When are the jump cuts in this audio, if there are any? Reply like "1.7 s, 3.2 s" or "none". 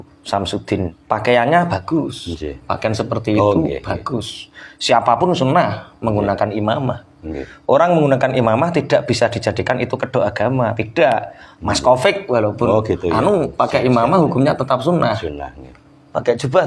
1.0 s